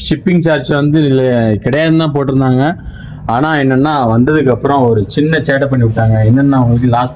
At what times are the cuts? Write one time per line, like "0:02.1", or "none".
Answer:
none